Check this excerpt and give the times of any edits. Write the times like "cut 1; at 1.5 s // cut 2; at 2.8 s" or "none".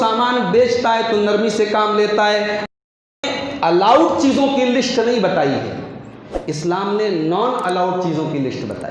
cut 1; at 2.9 s